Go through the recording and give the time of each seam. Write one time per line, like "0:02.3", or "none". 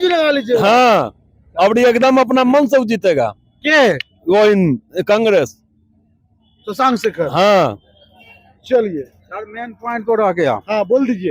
none